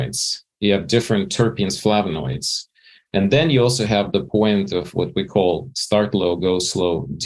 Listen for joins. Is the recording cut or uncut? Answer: cut